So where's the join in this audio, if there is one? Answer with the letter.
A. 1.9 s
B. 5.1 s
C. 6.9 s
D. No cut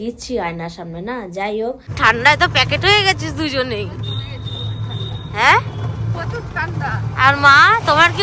A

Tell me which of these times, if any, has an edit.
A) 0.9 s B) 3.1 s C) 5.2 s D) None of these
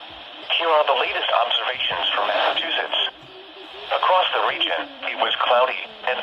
C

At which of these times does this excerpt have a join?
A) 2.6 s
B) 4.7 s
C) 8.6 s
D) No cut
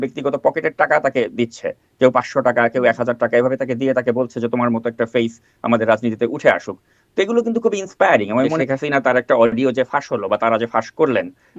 C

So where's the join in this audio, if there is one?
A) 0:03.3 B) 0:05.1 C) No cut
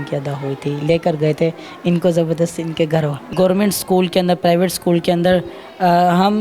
A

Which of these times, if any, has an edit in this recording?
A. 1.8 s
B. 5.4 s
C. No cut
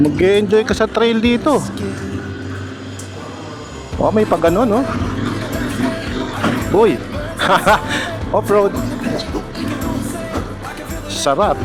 C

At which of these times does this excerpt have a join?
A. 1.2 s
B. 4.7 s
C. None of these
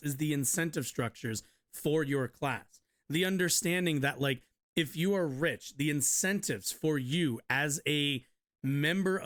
C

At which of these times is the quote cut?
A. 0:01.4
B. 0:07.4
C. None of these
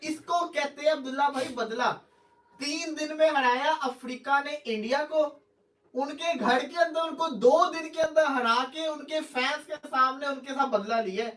C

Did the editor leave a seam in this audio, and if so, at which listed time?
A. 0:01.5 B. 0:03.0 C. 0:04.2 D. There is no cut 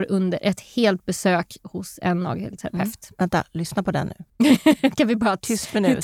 C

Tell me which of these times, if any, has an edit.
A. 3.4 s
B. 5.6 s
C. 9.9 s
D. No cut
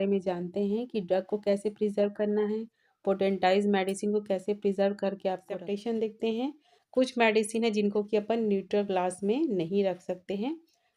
B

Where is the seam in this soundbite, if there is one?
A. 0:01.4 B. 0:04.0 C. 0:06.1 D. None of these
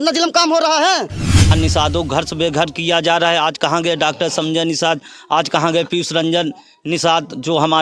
A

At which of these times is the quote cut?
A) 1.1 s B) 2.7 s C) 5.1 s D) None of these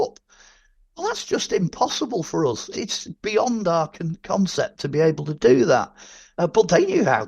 B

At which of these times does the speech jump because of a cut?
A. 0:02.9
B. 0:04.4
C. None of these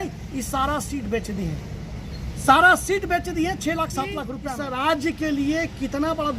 B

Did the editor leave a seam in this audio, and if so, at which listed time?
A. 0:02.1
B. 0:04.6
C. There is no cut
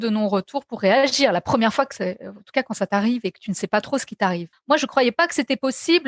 B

